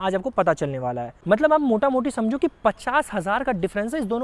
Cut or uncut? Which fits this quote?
cut